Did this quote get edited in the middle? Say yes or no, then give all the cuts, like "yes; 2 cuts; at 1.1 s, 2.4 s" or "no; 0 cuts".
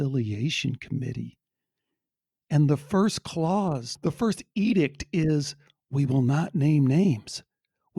no; 0 cuts